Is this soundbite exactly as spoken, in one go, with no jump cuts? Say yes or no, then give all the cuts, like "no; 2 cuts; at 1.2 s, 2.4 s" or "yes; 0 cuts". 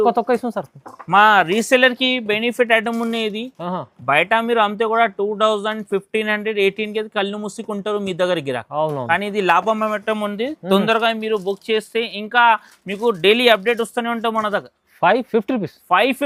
yes; 0 cuts